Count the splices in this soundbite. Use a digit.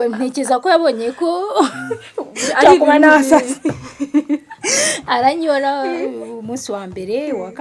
0